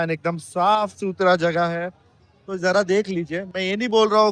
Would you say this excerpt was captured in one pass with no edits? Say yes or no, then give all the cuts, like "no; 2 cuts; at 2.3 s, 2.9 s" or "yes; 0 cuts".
yes; 0 cuts